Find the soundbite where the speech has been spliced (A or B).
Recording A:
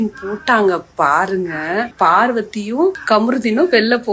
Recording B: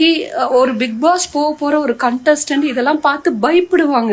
A